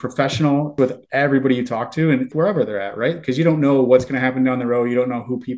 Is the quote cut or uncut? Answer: cut